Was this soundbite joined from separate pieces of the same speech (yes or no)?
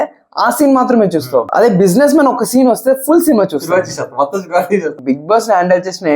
yes